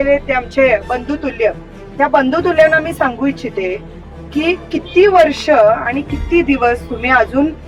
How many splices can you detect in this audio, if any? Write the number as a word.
zero